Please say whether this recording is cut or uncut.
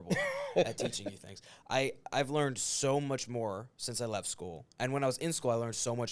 uncut